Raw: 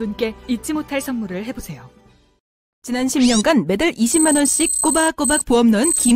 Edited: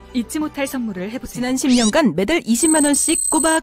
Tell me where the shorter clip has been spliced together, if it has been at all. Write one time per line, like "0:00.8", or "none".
0:01.3